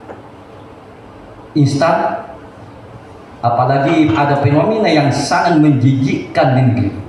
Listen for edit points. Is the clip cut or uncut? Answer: uncut